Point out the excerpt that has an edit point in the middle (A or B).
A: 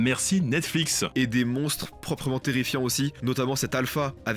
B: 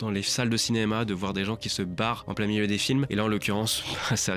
A